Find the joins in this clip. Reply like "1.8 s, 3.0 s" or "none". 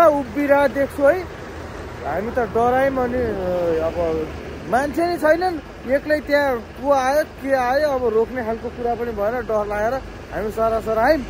none